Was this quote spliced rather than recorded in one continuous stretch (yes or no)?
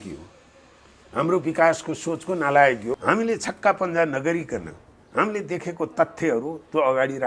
yes